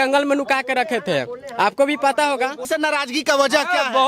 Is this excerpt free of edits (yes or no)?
no